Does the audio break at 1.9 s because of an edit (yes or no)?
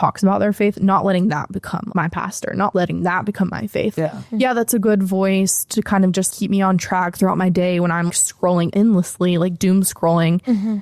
yes